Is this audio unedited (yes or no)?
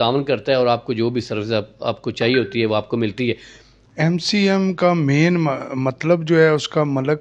no